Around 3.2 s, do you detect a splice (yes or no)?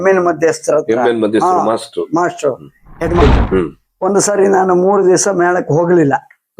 yes